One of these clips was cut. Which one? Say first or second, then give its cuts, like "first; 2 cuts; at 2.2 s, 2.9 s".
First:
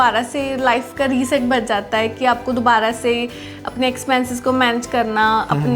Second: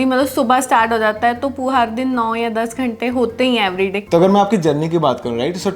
second; 1 cut; at 4.0 s